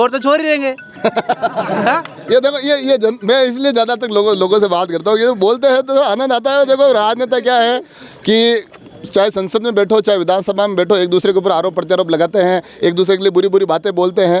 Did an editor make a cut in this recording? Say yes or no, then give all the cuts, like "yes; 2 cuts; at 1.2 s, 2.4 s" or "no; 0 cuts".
no; 0 cuts